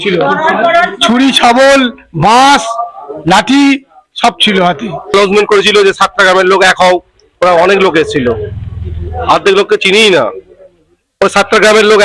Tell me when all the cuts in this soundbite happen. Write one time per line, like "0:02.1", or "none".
0:05.1